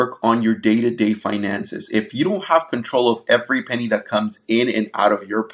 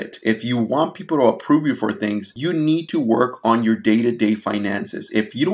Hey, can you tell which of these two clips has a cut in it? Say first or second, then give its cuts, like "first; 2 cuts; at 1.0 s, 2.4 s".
second; 1 cut; at 2.3 s